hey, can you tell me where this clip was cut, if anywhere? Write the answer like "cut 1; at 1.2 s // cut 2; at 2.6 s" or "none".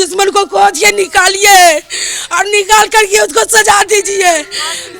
none